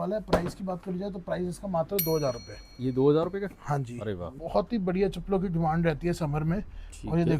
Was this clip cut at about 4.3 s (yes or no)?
yes